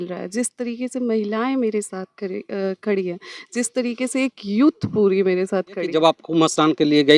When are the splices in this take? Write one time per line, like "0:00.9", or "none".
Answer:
0:05.9